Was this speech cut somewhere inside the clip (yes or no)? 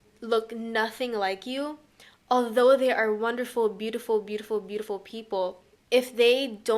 yes